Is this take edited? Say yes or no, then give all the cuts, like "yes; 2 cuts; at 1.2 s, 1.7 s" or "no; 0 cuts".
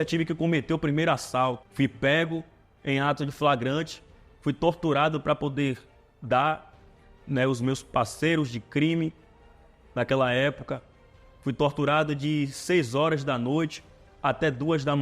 yes; 1 cut; at 1.7 s